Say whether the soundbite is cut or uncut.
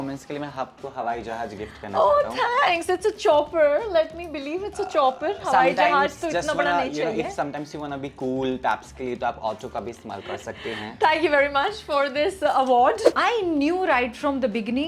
cut